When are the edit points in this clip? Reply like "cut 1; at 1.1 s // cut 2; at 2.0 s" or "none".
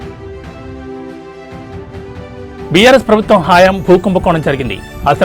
none